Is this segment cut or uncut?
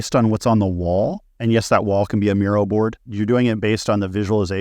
cut